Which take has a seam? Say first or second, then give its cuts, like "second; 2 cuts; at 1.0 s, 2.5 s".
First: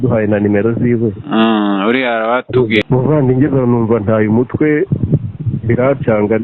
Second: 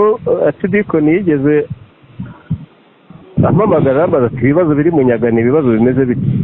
first; 1 cut; at 2.8 s